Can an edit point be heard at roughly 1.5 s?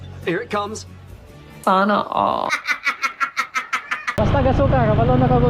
no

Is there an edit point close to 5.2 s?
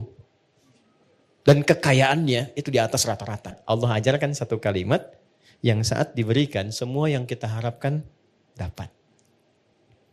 no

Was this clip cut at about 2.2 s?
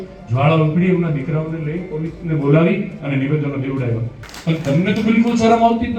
no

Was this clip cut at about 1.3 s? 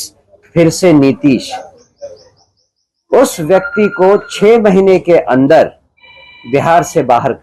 no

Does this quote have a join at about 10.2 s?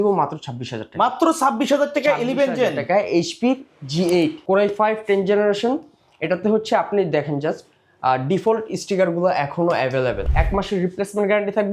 yes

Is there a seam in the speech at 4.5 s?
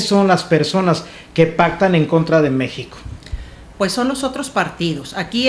no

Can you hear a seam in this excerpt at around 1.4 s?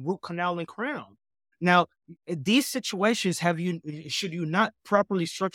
yes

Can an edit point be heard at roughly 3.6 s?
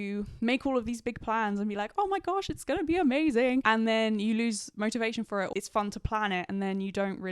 yes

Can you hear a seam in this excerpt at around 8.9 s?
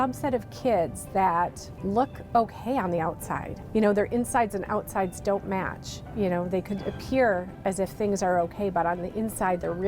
no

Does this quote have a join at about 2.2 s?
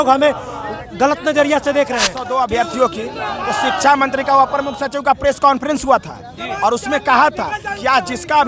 yes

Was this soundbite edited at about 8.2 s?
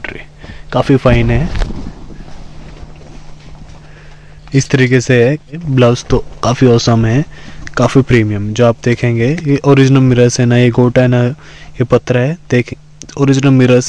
no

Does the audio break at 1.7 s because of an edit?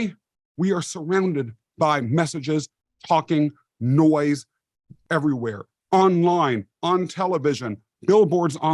no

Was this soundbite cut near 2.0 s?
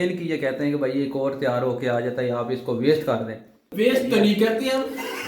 no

